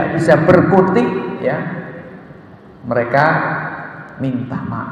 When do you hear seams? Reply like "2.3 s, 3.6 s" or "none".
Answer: none